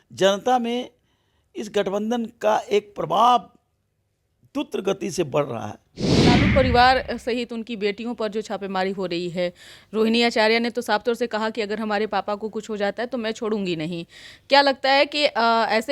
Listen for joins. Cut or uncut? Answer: cut